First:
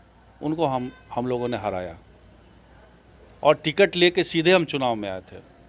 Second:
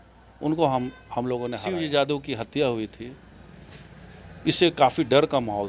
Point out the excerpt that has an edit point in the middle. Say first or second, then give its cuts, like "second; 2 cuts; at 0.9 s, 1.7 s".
second; 1 cut; at 1.6 s